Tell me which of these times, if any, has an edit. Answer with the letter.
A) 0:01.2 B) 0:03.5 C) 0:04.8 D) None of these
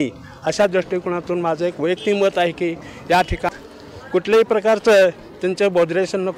B